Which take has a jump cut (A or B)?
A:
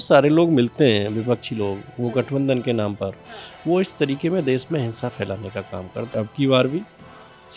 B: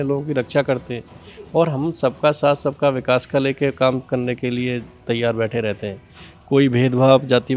A